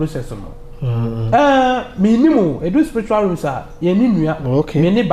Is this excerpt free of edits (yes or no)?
yes